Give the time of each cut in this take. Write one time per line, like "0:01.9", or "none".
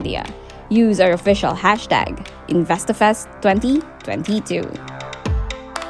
0:04.9